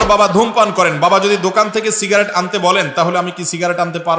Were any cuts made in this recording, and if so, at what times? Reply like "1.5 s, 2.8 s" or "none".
none